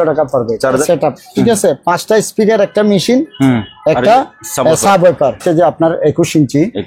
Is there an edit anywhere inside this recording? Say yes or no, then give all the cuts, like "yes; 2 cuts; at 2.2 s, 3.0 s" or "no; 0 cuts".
yes; 2 cuts; at 0.7 s, 5.4 s